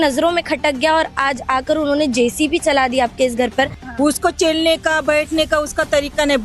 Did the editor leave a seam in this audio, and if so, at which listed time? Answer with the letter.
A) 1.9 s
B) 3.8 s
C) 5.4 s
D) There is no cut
B